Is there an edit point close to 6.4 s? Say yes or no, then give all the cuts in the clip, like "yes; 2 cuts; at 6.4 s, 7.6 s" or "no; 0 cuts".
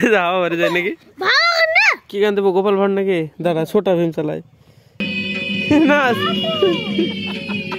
no; 3 cuts; at 1.1 s, 2.0 s, 5.0 s